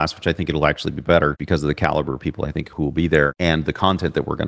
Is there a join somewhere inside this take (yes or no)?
yes